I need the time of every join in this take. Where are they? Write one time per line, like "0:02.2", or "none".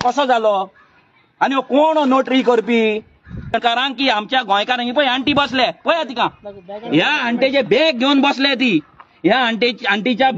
0:03.6